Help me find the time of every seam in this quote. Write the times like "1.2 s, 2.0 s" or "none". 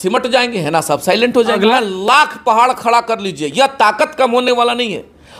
1.7 s